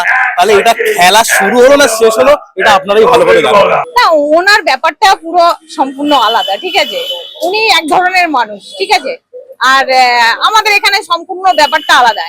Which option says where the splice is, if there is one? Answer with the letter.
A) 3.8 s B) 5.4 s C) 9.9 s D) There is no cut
A